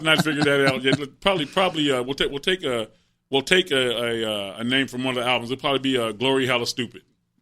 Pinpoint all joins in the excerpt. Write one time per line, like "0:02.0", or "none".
none